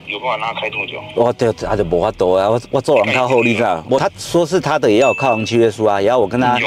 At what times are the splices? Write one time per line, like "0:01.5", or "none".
0:04.0